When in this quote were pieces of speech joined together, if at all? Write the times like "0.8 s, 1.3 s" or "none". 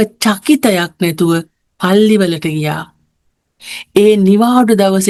none